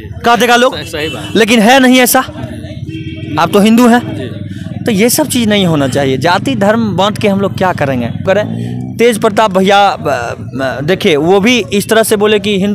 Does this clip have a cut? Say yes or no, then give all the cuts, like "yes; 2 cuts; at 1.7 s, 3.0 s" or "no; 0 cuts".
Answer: yes; 1 cut; at 8.2 s